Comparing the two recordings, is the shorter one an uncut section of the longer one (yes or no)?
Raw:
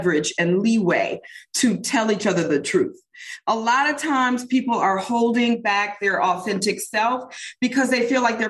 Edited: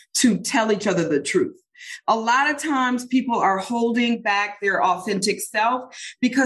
yes